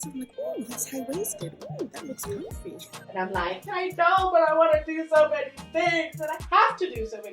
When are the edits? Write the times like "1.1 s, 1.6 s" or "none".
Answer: 3.0 s